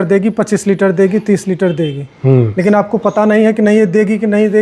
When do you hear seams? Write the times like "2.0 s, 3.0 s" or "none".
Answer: none